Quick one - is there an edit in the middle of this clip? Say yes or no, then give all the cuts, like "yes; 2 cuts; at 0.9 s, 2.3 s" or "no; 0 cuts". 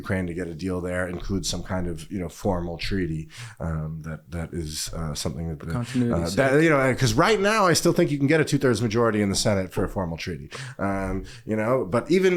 no; 0 cuts